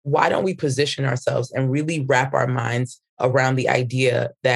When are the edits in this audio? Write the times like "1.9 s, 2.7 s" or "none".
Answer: none